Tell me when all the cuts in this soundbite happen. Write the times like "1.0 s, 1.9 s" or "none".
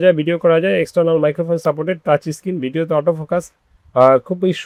none